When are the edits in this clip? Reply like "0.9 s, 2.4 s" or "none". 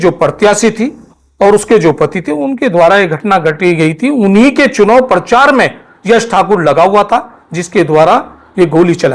none